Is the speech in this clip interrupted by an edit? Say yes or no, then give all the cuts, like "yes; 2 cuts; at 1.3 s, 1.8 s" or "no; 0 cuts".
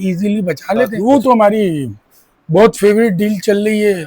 yes; 1 cut; at 0.9 s